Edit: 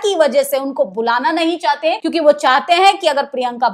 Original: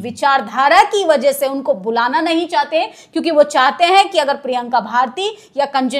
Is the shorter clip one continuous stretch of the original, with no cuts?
no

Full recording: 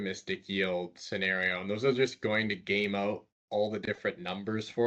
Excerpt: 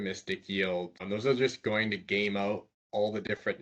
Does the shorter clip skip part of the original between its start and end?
yes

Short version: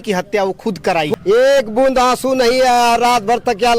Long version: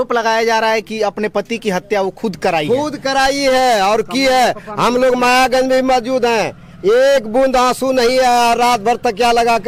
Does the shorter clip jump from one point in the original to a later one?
yes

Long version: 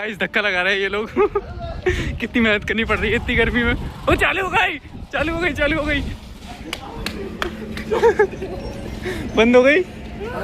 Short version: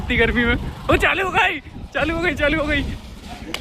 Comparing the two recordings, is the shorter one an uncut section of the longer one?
yes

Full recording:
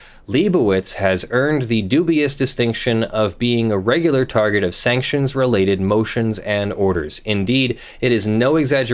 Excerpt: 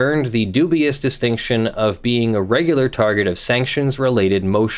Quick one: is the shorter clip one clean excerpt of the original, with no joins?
yes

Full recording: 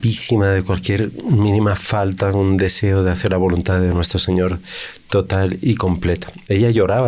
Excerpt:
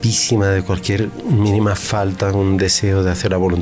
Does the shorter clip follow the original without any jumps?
yes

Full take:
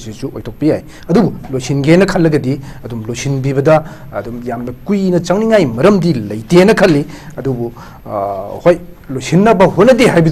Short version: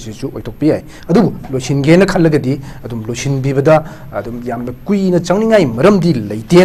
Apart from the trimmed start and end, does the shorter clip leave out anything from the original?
no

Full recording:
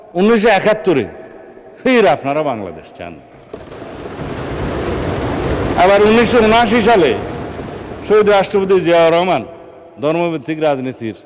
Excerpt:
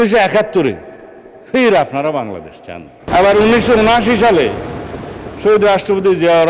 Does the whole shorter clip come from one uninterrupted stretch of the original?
no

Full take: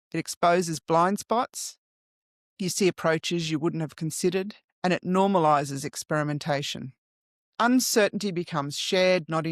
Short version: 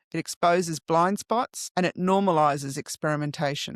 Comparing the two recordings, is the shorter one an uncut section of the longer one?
no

